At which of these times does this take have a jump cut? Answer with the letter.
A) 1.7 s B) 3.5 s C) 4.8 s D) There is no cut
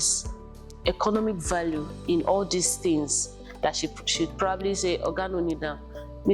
D